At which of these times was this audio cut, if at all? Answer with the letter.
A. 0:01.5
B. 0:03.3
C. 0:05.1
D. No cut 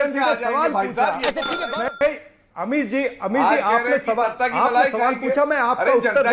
D